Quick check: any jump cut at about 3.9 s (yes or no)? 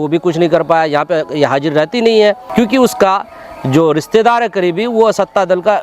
no